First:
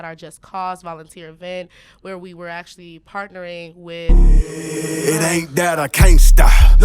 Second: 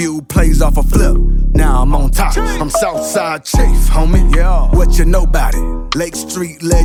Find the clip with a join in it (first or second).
first